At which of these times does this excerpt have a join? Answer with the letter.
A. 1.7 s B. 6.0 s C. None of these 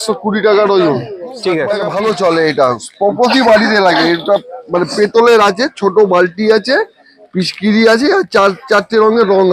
A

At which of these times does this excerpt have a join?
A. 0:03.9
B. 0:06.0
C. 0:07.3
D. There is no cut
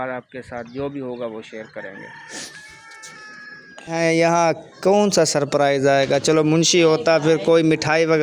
A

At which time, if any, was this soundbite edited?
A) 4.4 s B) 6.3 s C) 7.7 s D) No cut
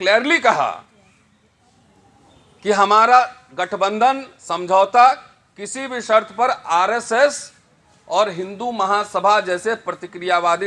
D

